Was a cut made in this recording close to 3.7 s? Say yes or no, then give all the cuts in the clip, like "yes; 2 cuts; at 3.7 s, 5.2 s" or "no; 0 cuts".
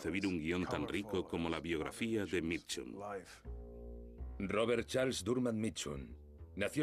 no; 1 cut; at 2.4 s